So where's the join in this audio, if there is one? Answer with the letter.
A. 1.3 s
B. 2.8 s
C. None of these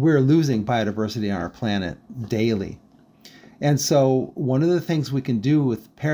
C